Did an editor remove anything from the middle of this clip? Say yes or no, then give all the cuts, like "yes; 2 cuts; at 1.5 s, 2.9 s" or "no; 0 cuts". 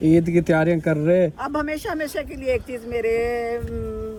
no; 0 cuts